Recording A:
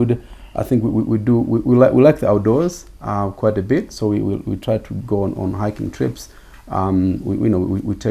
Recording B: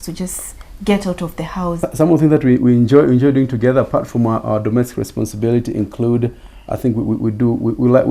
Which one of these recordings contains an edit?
B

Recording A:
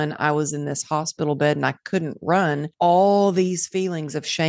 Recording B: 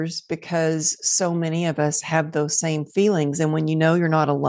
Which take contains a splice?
A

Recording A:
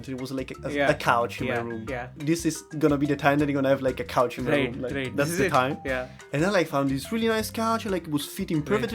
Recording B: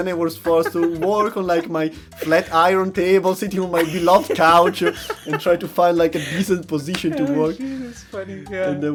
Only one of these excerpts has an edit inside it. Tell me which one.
A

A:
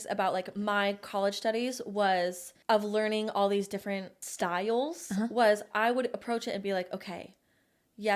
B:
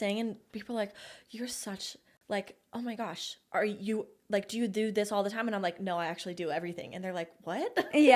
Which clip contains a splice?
A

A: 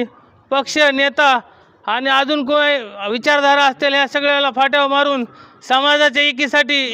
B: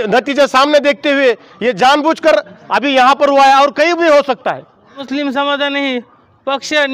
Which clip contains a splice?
B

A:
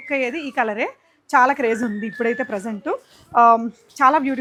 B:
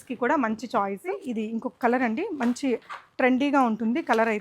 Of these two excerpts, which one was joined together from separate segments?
B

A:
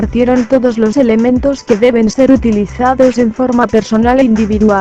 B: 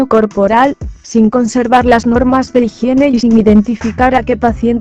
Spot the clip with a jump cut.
B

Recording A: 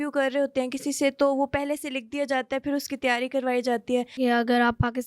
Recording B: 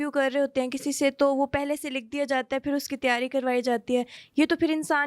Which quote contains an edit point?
A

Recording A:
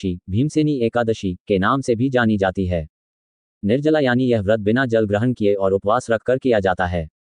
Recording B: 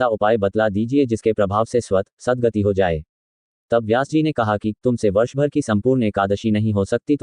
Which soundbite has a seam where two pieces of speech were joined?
A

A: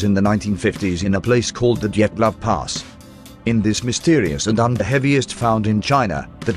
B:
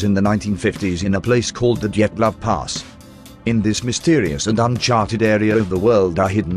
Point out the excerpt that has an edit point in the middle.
B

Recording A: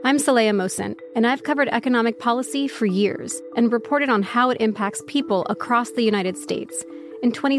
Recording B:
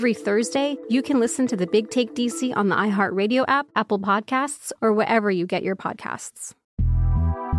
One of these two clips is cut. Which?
B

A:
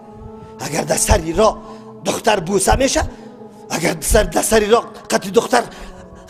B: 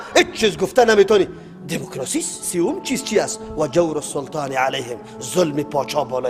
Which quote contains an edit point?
B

